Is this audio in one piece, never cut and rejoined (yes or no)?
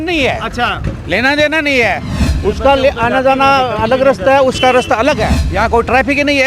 no